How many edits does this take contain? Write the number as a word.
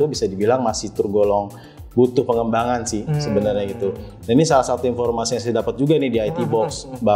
zero